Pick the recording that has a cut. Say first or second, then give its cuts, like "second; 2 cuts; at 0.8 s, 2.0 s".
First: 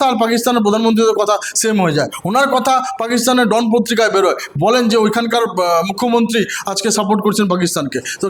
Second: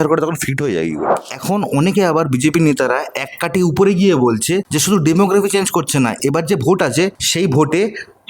second; 3 cuts; at 1.2 s, 4.7 s, 7.2 s